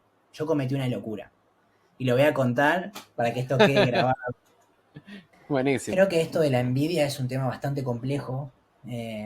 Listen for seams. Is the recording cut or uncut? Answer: cut